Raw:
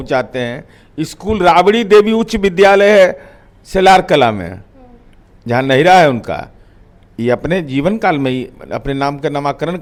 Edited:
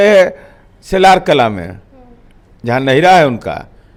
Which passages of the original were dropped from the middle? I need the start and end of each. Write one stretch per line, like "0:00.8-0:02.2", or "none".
none